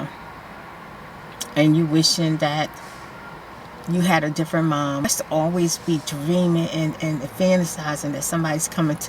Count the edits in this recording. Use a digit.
1